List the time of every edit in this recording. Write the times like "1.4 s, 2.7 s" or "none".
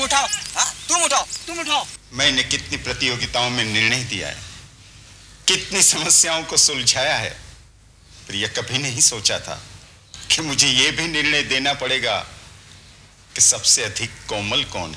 2.0 s